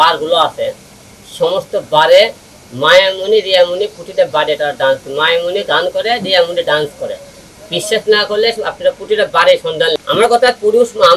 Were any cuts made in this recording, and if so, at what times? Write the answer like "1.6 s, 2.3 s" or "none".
10.0 s